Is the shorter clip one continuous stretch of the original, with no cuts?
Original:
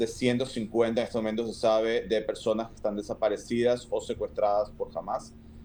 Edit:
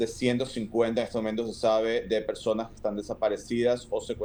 yes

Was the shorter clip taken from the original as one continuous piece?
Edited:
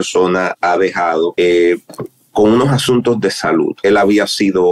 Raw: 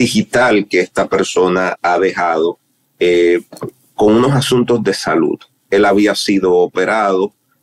no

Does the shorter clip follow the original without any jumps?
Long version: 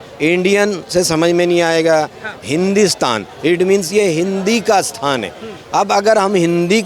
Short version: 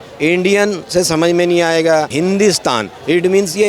no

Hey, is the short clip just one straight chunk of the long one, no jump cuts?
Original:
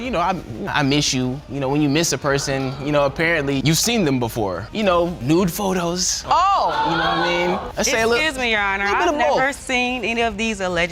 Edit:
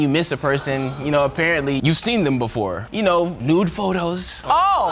yes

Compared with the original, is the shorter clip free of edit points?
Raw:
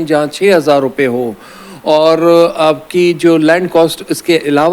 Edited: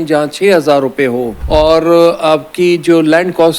no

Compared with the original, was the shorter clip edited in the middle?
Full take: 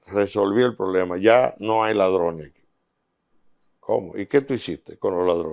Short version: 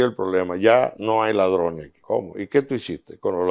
yes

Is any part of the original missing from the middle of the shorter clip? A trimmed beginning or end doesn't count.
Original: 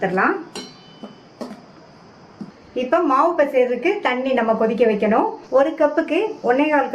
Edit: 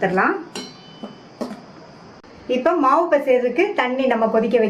yes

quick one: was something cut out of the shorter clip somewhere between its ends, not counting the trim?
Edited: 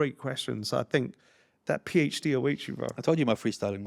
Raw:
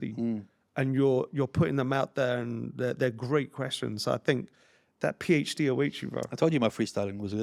no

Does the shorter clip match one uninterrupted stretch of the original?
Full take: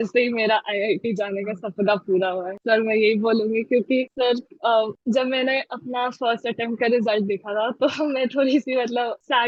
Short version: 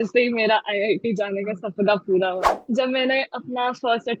no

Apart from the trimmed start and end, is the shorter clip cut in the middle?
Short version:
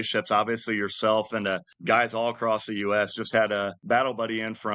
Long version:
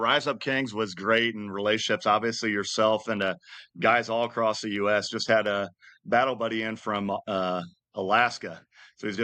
yes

